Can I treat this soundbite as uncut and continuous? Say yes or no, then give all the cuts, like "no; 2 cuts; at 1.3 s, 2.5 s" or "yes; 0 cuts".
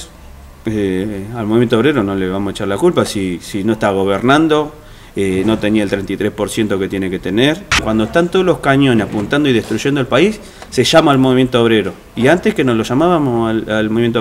no; 1 cut; at 7.8 s